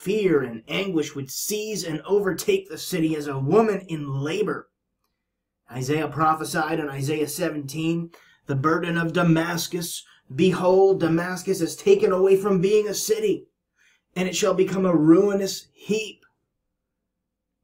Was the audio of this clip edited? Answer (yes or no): yes